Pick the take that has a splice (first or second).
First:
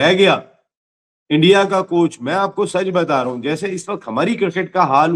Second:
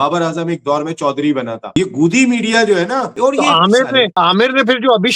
second